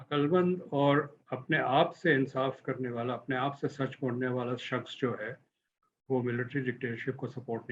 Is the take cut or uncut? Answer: uncut